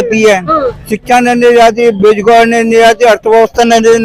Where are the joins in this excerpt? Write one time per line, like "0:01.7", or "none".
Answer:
none